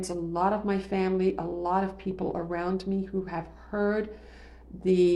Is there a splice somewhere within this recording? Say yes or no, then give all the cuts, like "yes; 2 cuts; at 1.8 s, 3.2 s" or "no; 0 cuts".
no; 0 cuts